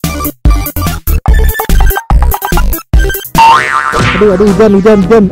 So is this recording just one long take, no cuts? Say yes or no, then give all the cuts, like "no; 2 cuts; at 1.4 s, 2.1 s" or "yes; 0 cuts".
no; 1 cut; at 3.6 s